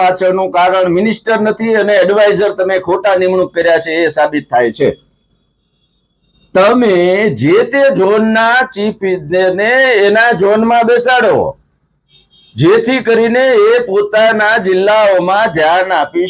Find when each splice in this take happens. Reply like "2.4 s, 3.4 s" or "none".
none